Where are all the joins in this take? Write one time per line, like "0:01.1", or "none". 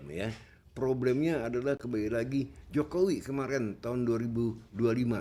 none

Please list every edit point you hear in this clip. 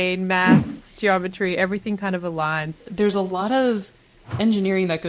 0:02.7
0:04.3

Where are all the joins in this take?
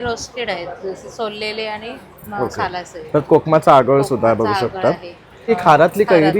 0:05.5

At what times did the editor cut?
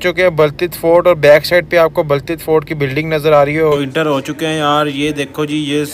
0:03.8

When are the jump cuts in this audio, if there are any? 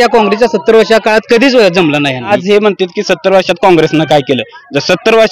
0:02.3

